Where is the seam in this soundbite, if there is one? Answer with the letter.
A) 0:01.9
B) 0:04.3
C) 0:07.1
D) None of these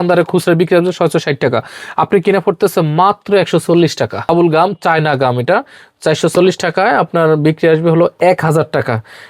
B